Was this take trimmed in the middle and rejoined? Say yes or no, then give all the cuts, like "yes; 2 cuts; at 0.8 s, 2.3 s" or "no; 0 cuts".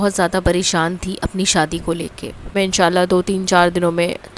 yes; 1 cut; at 2.5 s